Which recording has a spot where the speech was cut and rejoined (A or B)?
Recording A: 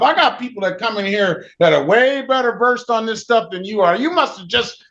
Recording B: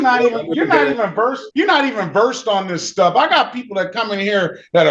B